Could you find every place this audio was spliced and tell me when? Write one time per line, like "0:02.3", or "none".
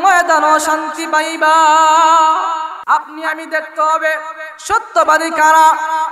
0:02.7